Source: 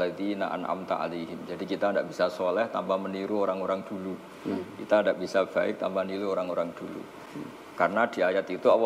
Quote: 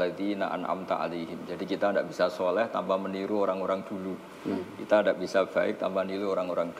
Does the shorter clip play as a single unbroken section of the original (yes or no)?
yes